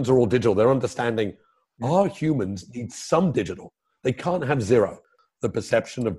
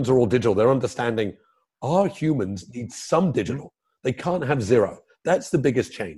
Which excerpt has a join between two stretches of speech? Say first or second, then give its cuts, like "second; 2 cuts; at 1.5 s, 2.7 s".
first; 1 cut; at 5.1 s